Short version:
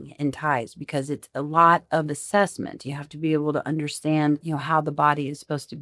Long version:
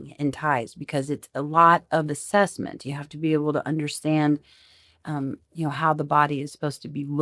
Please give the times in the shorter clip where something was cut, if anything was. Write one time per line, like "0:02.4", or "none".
0:04.4